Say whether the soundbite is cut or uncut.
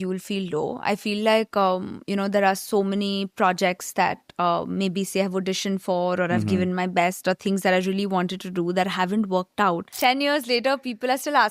cut